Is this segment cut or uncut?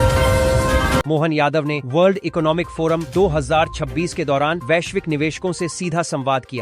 cut